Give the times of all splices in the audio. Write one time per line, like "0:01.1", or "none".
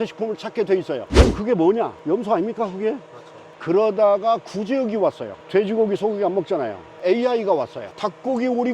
0:03.4
0:07.0